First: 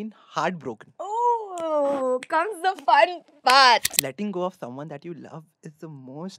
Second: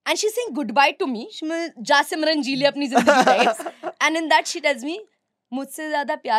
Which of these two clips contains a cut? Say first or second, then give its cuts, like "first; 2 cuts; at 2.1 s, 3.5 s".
first; 1 cut; at 4.0 s